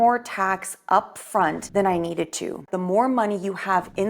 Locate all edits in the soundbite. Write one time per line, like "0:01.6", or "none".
0:01.6
0:02.7